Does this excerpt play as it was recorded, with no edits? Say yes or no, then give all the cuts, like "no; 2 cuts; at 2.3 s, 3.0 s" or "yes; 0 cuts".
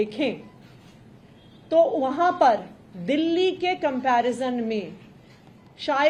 yes; 0 cuts